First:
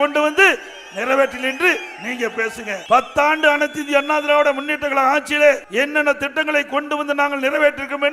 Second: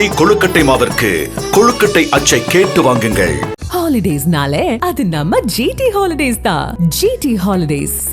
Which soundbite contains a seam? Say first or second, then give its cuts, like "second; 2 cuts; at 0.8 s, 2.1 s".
first; 2 cuts; at 2.8 s, 5.6 s